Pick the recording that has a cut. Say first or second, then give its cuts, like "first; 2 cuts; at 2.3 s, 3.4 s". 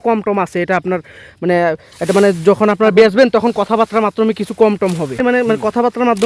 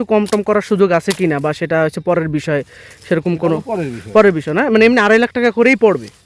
first; 1 cut; at 5.2 s